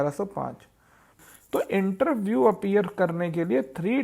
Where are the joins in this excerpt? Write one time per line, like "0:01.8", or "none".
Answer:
0:01.2